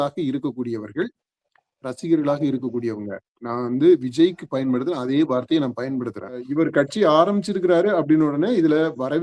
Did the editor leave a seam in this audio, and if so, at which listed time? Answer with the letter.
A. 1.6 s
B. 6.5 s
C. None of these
B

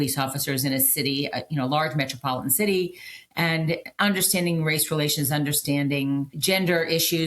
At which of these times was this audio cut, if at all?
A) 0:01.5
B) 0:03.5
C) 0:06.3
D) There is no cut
C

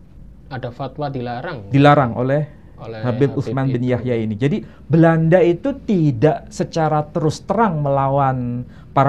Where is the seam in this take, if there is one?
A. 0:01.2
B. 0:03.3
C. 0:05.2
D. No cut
D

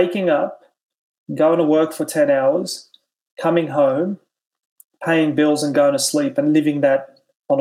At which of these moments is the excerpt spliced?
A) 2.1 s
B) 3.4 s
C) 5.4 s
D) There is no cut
D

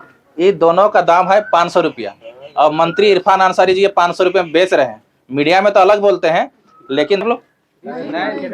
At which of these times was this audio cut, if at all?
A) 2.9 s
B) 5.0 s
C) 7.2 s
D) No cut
C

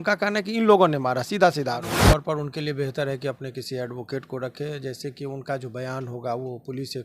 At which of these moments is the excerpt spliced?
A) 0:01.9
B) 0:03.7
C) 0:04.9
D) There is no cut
A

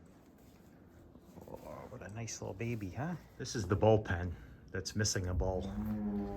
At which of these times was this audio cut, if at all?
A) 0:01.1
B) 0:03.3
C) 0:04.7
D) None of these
B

